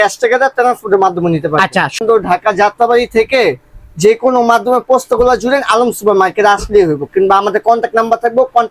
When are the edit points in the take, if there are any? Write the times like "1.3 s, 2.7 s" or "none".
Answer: 2.0 s